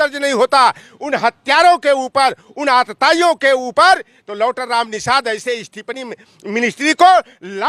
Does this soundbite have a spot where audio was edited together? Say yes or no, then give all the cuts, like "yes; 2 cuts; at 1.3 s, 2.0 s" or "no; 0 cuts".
no; 0 cuts